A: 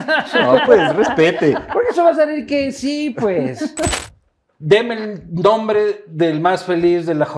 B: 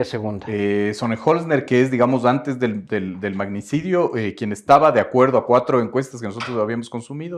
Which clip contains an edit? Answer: A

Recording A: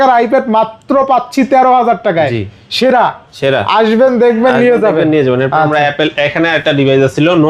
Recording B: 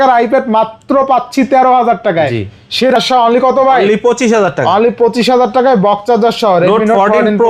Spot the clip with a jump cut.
B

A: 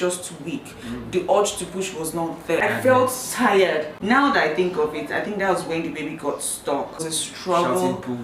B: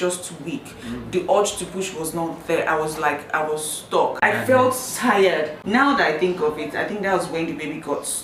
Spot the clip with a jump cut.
A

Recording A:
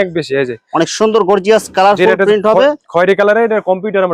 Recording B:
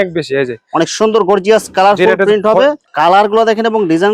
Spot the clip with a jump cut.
B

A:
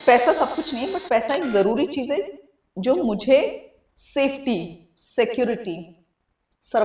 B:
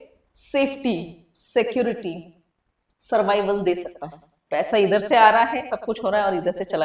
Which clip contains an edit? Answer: B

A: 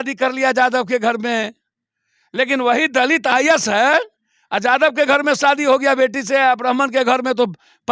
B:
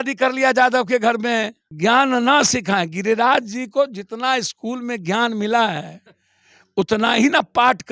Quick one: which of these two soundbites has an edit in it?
B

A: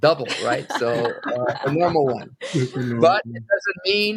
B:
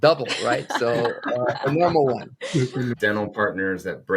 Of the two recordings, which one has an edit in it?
B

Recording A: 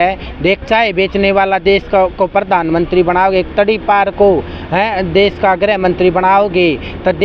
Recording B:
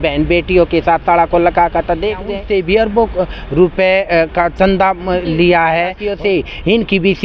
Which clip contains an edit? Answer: B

